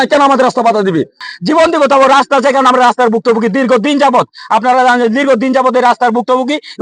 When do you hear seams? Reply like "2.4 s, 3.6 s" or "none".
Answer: 1.2 s